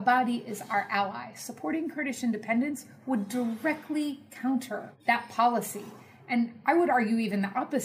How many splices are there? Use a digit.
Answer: 1